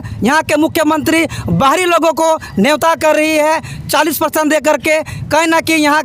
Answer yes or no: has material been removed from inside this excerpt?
no